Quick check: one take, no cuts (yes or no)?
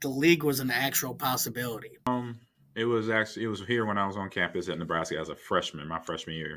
no